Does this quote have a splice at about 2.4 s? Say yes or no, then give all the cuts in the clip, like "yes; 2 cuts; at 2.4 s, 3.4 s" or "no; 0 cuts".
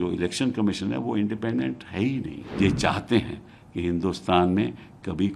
yes; 1 cut; at 2.4 s